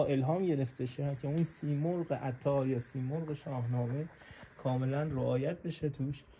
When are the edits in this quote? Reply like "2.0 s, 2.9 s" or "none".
none